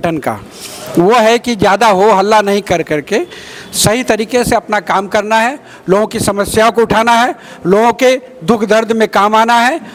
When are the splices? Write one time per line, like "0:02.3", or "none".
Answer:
none